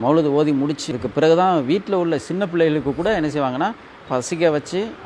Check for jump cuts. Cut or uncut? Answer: cut